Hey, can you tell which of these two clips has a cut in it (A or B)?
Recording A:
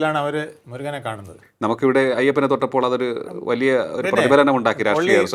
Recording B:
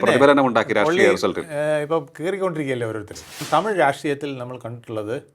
B